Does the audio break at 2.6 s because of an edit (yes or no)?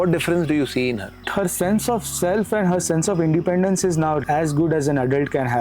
no